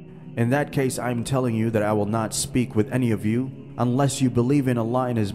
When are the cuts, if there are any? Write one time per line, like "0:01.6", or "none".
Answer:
0:03.6